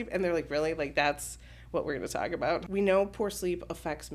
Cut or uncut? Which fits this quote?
cut